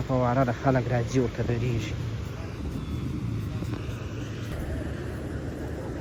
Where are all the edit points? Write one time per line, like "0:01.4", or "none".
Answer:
none